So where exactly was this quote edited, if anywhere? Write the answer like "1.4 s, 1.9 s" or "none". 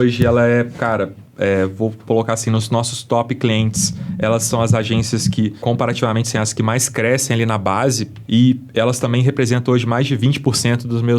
5.6 s, 8.1 s